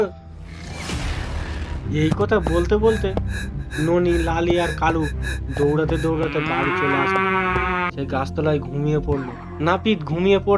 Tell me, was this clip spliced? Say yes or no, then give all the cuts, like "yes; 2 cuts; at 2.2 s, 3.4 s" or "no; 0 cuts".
yes; 2 cuts; at 1.8 s, 8.0 s